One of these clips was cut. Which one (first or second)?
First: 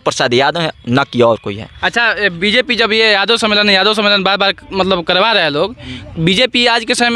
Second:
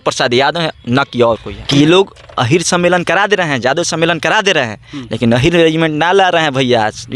second